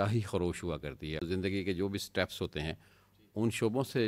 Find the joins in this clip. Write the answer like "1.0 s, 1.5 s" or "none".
1.2 s